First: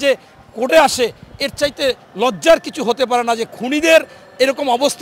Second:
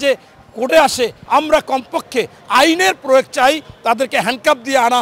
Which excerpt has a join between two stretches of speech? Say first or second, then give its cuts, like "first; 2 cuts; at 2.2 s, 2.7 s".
second; 1 cut; at 1.2 s